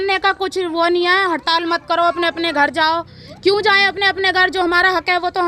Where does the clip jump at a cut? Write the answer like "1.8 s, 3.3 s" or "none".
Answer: none